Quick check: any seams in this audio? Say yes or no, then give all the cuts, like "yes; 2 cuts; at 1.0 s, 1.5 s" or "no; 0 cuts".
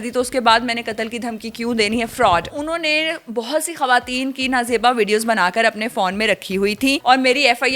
yes; 2 cuts; at 2.5 s, 7.0 s